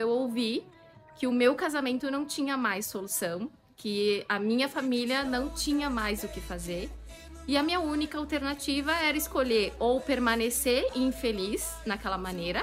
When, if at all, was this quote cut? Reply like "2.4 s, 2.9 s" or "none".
none